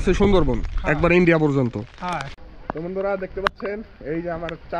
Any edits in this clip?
yes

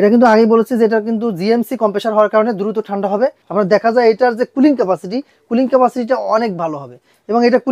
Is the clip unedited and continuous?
no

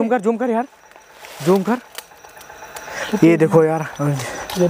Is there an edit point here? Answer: no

